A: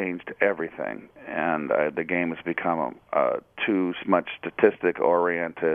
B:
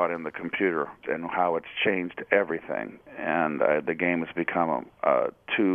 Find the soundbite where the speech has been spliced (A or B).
B